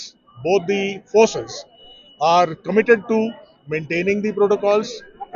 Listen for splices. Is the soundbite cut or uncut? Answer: uncut